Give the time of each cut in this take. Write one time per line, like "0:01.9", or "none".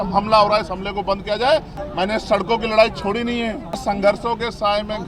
0:01.8
0:03.8